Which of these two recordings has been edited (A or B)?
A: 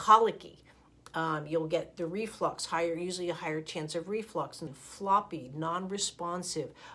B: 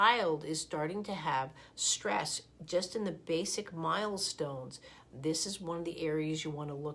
A